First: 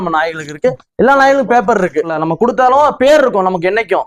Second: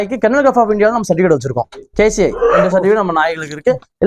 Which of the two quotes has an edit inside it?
first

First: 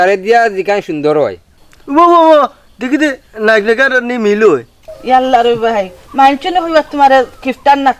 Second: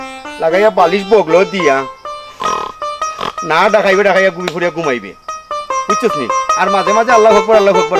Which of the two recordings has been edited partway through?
first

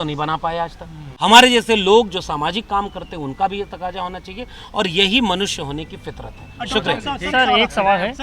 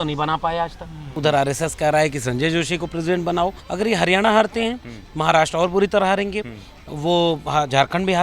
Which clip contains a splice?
second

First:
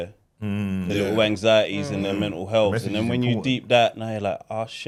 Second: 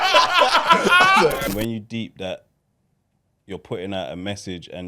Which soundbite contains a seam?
second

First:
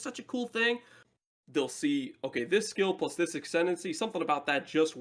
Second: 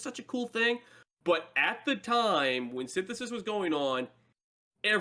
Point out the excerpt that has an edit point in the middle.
first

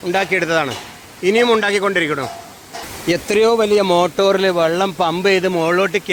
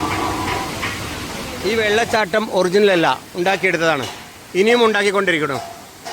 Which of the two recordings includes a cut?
second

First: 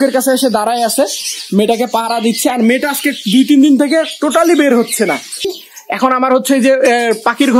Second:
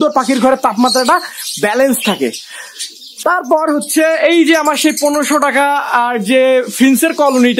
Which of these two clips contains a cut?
first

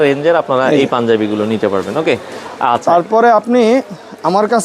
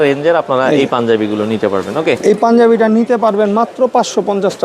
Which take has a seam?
second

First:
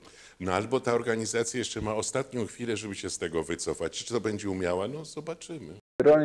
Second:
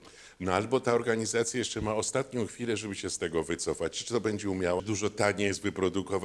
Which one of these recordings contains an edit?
second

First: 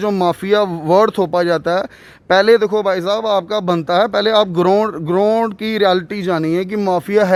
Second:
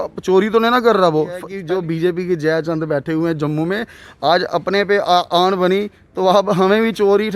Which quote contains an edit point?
second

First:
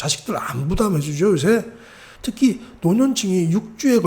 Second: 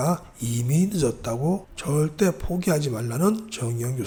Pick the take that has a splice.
first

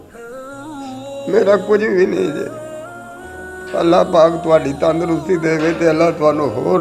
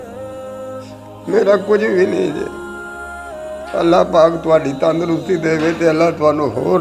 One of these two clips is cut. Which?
second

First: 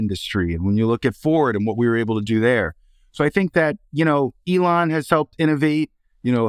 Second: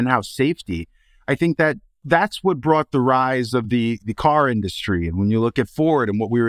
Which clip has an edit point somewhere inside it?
second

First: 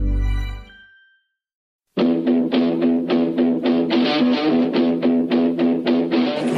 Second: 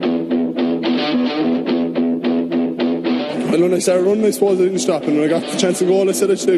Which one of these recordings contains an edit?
first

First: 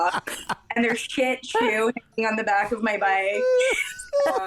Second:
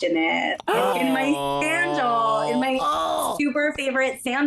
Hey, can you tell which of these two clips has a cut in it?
second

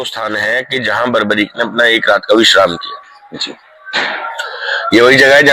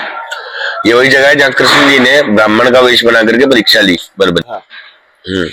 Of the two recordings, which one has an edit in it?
second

